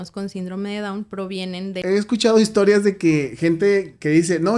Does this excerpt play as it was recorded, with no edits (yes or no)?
no